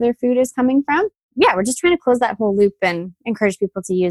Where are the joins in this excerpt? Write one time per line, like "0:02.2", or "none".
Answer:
0:01.3